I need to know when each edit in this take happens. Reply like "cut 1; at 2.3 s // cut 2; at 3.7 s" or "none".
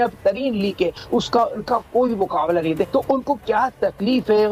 none